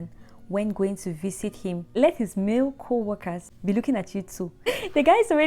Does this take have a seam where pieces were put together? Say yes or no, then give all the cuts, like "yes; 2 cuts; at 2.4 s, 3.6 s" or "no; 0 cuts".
yes; 3 cuts; at 1.9 s, 3.4 s, 4.7 s